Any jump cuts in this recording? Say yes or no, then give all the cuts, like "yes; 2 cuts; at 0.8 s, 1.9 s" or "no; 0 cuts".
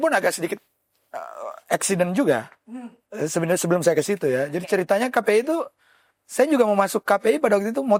no; 0 cuts